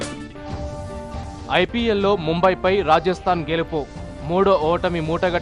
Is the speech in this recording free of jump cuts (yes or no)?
no